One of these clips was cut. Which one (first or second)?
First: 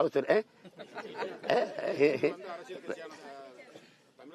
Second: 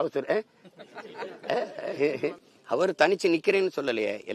second